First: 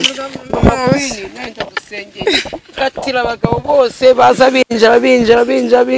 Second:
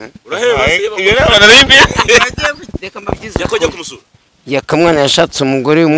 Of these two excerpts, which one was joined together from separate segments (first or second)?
second